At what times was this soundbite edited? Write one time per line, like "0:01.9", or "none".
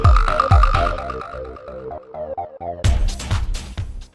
0:00.9